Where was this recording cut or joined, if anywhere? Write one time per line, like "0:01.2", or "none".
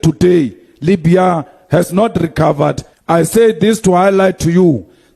0:02.9